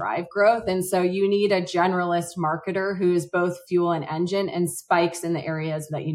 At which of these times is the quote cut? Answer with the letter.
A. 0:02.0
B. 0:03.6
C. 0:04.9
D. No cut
D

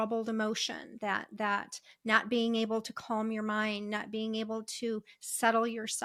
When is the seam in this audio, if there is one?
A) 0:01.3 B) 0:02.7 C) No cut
C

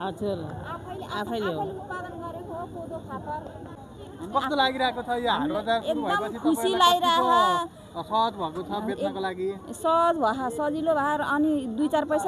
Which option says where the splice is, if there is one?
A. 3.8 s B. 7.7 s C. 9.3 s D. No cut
A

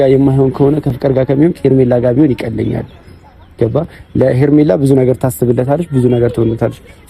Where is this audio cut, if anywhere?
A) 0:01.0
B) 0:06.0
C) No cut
A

